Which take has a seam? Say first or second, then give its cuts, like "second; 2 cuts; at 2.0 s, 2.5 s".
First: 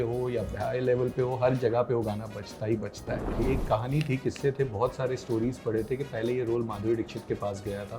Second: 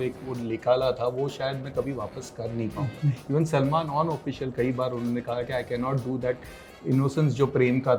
first; 1 cut; at 3.4 s